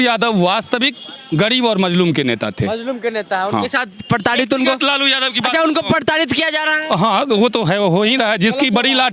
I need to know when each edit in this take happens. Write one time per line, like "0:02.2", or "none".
none